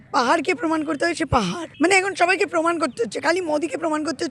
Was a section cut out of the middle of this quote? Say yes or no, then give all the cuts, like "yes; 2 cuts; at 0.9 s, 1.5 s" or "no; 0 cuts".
yes; 1 cut; at 1.7 s